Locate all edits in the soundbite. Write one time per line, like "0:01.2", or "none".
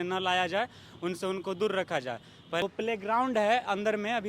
0:02.6